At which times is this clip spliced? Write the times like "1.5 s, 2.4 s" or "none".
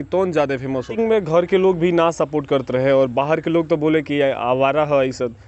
0.9 s